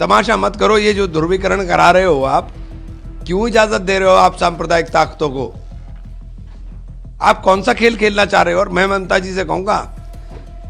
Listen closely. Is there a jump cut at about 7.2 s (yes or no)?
yes